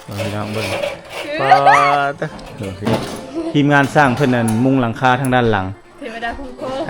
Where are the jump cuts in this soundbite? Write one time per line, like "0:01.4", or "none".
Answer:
0:02.9